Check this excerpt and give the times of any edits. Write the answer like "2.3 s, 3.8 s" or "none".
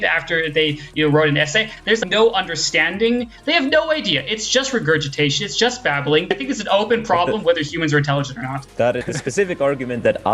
1.7 s, 3.3 s, 6.3 s, 9.1 s